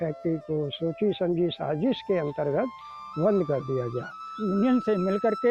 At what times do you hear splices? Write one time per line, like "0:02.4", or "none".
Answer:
0:04.3